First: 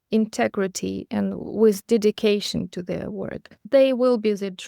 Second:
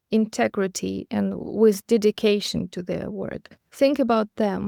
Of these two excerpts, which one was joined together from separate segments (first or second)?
first